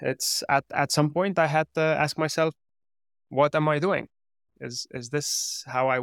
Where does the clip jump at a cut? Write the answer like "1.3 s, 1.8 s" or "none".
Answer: none